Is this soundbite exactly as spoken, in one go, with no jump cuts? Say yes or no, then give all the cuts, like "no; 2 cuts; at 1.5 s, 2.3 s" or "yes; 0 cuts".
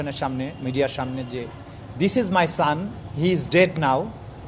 yes; 0 cuts